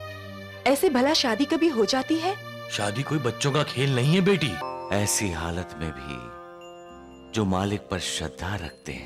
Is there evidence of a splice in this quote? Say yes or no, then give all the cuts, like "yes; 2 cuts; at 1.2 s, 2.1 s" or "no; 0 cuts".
yes; 1 cut; at 4.6 s